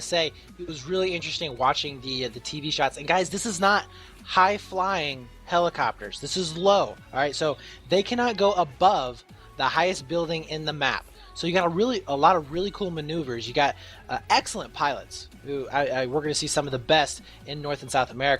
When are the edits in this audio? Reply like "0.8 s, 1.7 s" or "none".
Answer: none